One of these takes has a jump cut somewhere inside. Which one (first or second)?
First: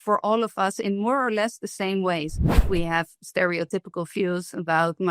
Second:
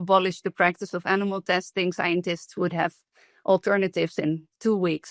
first